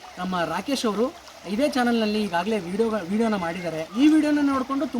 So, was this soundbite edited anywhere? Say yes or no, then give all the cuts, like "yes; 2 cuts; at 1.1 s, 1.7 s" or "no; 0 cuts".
yes; 1 cut; at 4.0 s